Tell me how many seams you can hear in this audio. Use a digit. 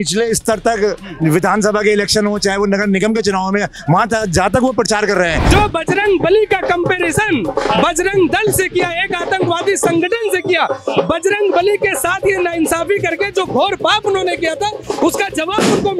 1